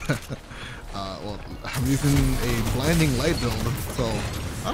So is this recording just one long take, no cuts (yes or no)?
yes